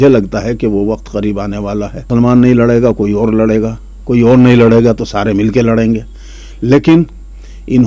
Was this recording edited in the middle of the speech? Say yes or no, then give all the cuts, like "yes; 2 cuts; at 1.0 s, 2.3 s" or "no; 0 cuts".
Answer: yes; 1 cut; at 2.1 s